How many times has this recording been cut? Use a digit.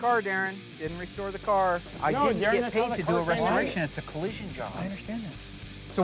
1